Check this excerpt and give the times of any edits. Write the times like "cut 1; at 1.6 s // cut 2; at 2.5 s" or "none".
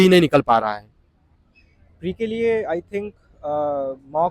none